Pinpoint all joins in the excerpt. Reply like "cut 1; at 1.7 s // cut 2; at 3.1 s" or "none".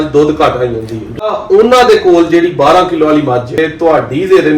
cut 1; at 1.4 s // cut 2; at 3.6 s